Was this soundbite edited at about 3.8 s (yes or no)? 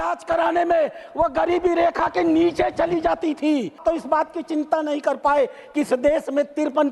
yes